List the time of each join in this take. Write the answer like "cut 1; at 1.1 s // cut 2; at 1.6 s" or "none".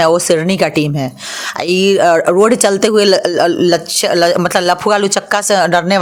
none